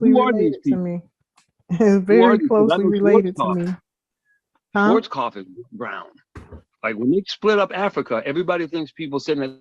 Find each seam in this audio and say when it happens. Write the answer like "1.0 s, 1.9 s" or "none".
8.7 s